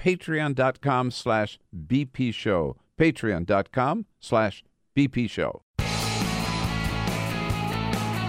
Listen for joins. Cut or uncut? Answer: cut